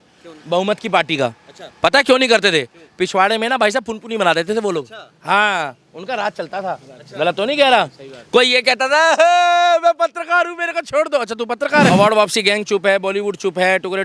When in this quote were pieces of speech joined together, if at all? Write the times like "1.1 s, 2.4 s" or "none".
11.9 s